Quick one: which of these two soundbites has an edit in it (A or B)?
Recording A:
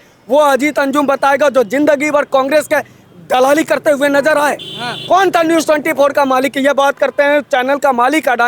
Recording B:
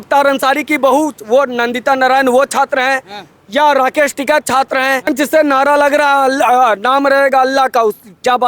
B